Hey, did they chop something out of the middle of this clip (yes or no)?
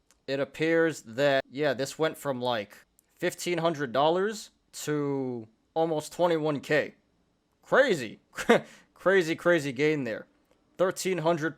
yes